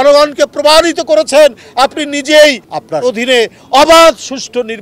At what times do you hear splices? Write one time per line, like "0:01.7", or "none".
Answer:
0:03.0